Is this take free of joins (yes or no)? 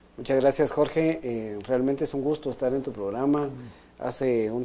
no